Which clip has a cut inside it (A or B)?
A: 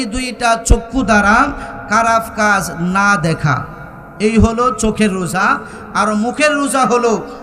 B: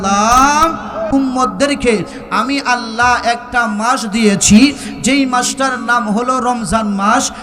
B